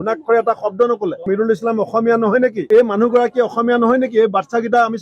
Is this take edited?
yes; 1 cut; at 2.6 s

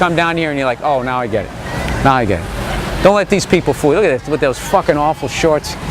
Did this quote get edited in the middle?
yes; 1 cut; at 3.3 s

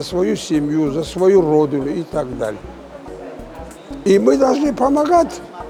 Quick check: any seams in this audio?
no; 0 cuts

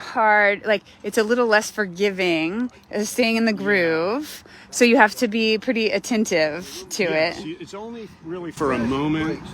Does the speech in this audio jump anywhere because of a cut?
yes; 1 cut; at 7.8 s

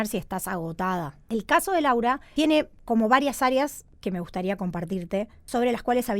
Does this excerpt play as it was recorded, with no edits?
no; 4 cuts; at 1.2 s, 2.2 s, 3.9 s, 5.4 s

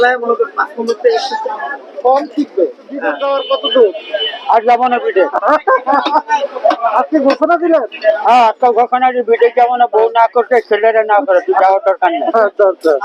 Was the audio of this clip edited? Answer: yes; 1 cut; at 3.2 s

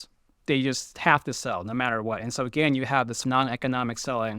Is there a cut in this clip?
yes; 1 cut; at 3.2 s

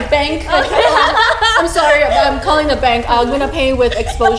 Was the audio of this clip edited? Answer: no; 0 cuts

